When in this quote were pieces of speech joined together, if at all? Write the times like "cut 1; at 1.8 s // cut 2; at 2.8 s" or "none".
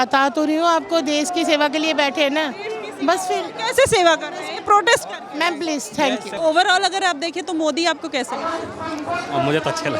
cut 1; at 6.4 s